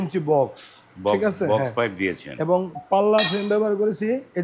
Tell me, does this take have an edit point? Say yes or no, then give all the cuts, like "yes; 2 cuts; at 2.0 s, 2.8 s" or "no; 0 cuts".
no; 0 cuts